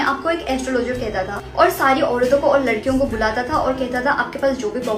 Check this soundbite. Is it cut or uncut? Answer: uncut